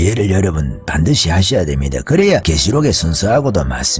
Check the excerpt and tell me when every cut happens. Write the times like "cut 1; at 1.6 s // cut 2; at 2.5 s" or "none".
cut 1; at 2.5 s

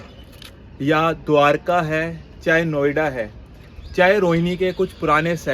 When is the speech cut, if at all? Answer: none

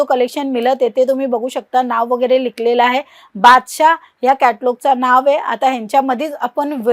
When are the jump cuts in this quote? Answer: none

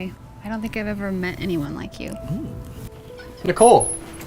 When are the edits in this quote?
cut 1; at 3.2 s

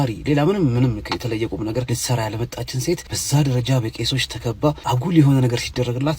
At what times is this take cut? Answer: cut 1; at 1.9 s // cut 2; at 3.1 s // cut 3; at 4.8 s

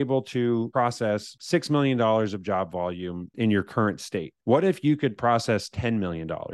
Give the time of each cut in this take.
cut 1; at 0.9 s // cut 2; at 3.3 s // cut 3; at 4.3 s

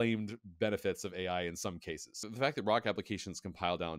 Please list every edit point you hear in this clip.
cut 1; at 2.1 s

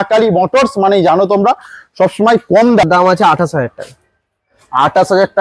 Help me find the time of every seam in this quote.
cut 1; at 2.8 s

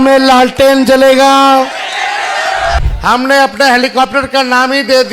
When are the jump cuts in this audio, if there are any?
cut 1; at 2.8 s

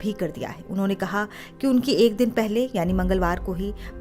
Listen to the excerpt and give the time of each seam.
none

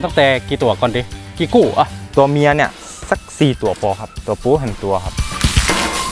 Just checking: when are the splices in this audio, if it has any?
cut 1; at 5.2 s

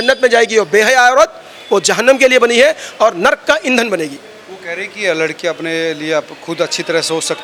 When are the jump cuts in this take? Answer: none

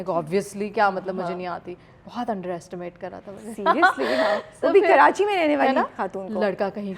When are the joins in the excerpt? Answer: none

